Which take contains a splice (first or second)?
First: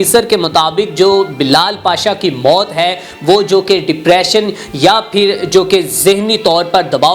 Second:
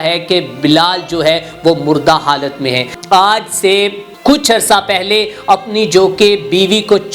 second